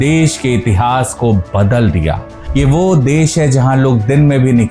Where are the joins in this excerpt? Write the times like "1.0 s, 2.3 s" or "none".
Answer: 2.3 s